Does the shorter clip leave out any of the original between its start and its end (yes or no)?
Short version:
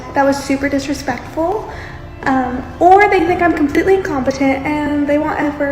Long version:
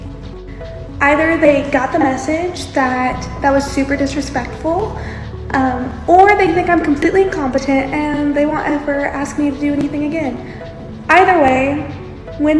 no